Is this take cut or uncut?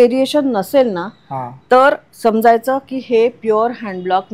uncut